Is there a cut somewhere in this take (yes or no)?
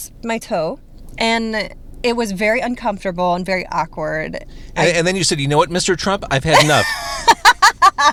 no